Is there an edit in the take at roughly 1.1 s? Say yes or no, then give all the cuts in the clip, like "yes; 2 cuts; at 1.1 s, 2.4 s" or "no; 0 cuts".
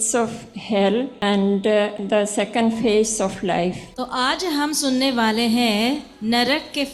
yes; 3 cuts; at 1.1 s, 2.0 s, 3.9 s